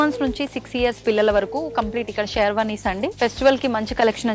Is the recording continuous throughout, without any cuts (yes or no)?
no